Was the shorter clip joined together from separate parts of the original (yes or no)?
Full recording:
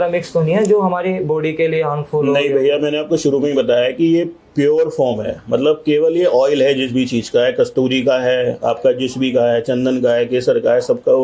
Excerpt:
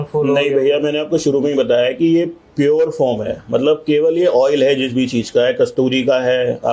no